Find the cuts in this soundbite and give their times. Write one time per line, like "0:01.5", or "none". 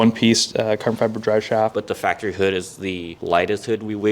0:01.8
0:03.1